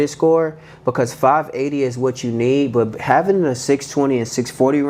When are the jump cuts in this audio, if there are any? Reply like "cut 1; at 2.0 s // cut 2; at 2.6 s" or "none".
none